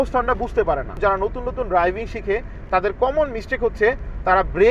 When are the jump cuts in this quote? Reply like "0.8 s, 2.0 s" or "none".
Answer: 0.9 s